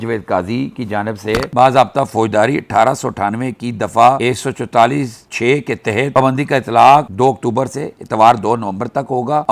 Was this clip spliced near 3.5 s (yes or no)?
no